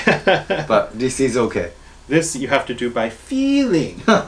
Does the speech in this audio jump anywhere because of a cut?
no; 0 cuts

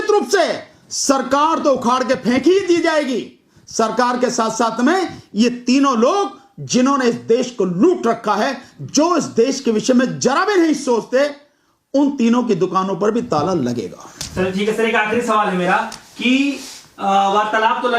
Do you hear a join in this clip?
no; 0 cuts

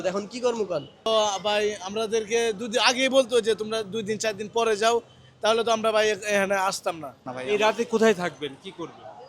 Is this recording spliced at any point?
yes; 2 cuts; at 1.1 s, 7.3 s

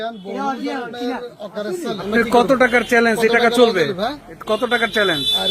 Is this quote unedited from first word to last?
no; 1 cut; at 2.1 s

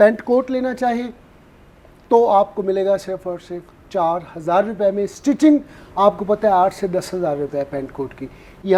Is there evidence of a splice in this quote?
no; 0 cuts

